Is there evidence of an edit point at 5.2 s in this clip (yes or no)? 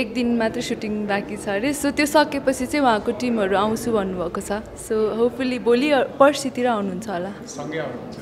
no